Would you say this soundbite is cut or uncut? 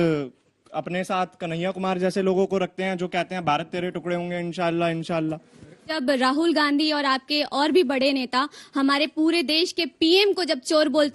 cut